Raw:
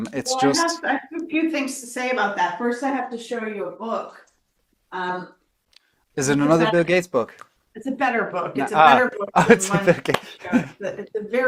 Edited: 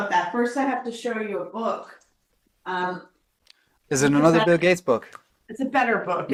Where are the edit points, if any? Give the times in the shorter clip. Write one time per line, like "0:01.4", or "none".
none